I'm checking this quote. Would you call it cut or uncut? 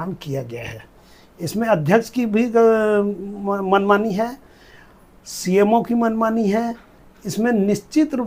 uncut